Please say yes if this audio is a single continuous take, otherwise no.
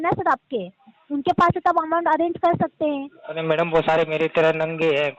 yes